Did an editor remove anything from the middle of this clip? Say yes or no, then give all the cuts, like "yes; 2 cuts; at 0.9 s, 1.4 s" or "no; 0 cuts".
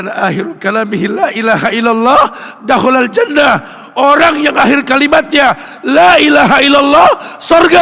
no; 0 cuts